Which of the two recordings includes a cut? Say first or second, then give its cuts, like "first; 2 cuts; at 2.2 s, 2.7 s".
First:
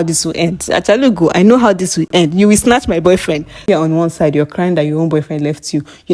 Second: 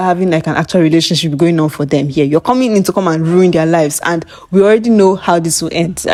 first; 2 cuts; at 2.1 s, 3.6 s